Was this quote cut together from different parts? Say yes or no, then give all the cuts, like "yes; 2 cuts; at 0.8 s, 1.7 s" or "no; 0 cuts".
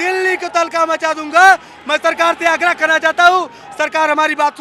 no; 0 cuts